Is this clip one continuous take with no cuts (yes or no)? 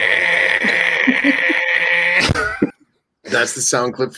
no